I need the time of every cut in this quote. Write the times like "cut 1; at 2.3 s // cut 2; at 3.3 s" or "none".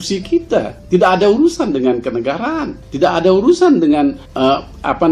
none